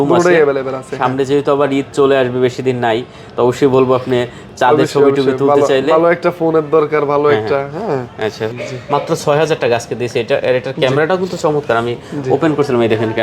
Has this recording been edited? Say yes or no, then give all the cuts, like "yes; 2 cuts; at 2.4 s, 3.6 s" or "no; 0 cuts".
yes; 1 cut; at 8.5 s